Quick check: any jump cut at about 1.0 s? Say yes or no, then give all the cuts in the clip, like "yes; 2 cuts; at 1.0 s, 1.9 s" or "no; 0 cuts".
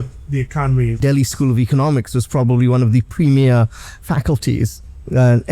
yes; 1 cut; at 1.0 s